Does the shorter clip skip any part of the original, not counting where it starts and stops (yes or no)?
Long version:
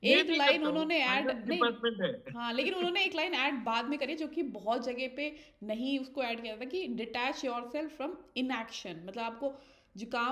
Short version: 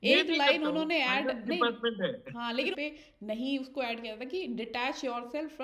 yes